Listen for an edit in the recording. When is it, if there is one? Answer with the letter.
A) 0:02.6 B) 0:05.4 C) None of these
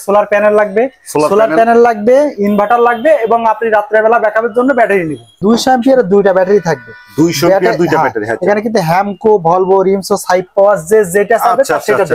B